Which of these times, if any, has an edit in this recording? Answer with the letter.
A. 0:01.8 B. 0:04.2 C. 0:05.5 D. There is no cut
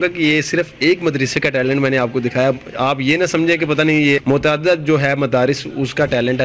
B